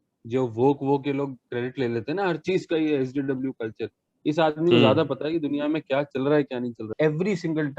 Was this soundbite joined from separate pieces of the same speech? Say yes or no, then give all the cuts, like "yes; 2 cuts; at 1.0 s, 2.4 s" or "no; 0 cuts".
yes; 1 cut; at 6.8 s